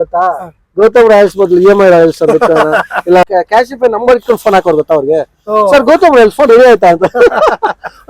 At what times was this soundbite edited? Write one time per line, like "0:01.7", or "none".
0:03.3